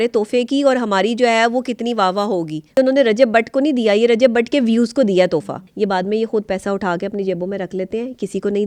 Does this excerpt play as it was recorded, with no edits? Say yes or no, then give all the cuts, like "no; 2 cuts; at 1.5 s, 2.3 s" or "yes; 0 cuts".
no; 2 cuts; at 2.7 s, 5.6 s